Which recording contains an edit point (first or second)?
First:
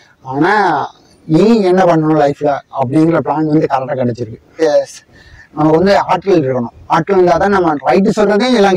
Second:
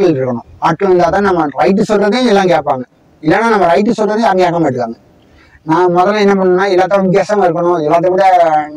first